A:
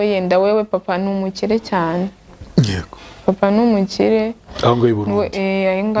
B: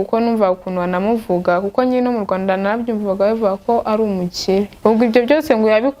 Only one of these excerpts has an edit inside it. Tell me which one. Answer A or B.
B